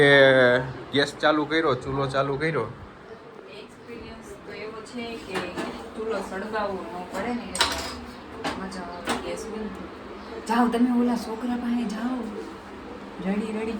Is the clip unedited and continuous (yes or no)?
yes